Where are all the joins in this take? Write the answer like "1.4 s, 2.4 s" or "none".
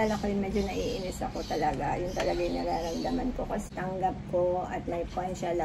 3.6 s